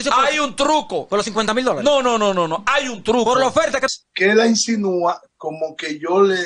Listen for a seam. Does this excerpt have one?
yes; 1 cut; at 4.0 s

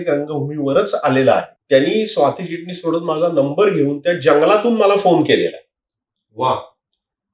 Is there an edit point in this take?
yes; 1 cut; at 1.6 s

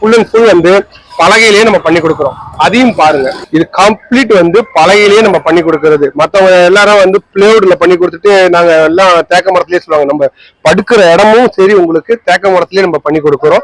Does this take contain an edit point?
no; 0 cuts

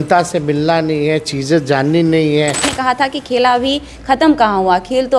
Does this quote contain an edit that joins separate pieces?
yes; 1 cut; at 2.7 s

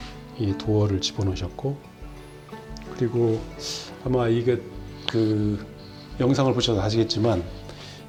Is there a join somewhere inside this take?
no; 0 cuts

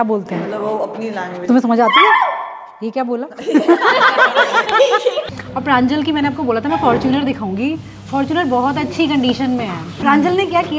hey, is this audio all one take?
no; 2 cuts; at 5.2 s, 9.8 s

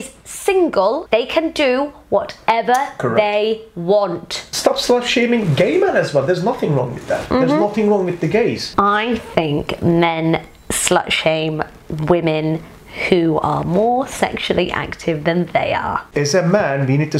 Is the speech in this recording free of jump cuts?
no; 4 cuts; at 1.0 s, 4.4 s, 8.7 s, 16.1 s

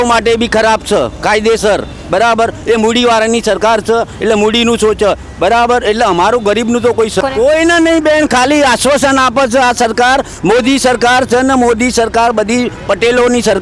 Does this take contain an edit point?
yes; 1 cut; at 7.2 s

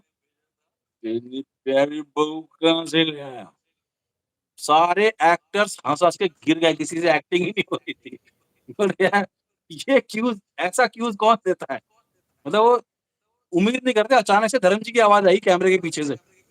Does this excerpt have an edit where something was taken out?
no; 0 cuts

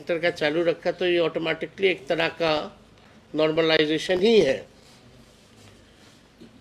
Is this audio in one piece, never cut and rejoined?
yes; 0 cuts

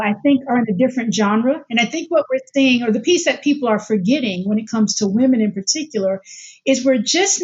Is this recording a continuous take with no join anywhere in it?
yes; 0 cuts

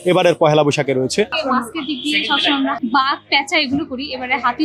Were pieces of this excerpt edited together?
yes; 2 cuts; at 1.4 s, 2.8 s

